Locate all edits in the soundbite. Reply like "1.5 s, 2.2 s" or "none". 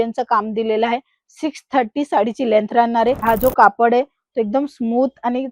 3.2 s

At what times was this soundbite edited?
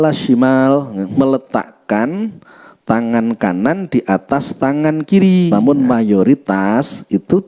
1.1 s, 5.5 s

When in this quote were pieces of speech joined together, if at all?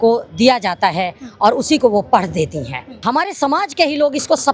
3.0 s

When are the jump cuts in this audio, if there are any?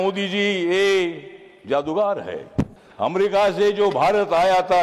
2.8 s

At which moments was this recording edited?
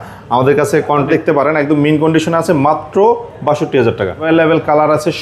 1.1 s, 4.2 s

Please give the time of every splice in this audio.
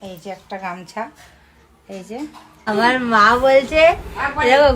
2.7 s

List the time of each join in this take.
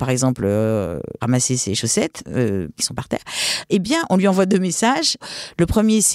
1.2 s, 2.8 s, 5.3 s

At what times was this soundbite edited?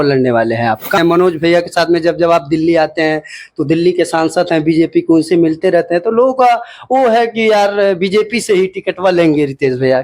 1.0 s

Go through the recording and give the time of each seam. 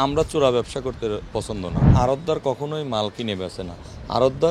1.9 s

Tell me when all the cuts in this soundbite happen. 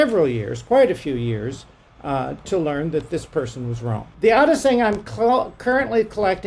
4.1 s

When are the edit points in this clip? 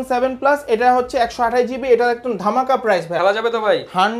3.1 s

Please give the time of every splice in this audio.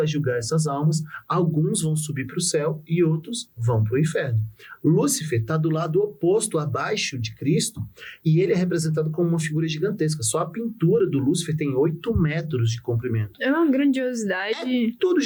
none

